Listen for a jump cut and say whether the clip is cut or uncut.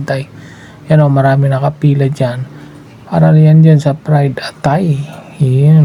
uncut